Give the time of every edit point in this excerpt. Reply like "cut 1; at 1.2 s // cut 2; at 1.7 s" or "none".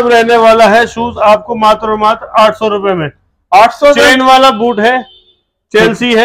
none